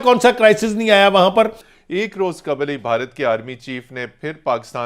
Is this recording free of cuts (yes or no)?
no